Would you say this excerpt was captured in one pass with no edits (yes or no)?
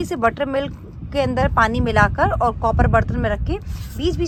yes